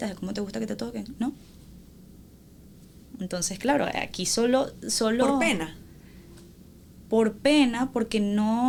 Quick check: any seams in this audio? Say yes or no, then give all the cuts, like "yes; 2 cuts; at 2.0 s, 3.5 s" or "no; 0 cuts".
no; 0 cuts